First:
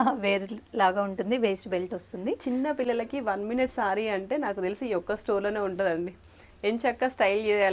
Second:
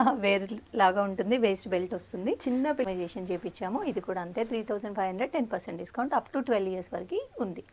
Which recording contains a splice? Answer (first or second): second